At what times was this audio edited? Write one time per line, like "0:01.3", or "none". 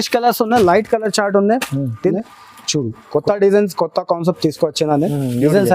0:02.1